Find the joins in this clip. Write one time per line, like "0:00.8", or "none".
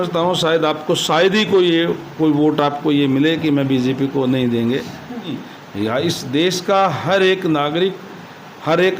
0:05.4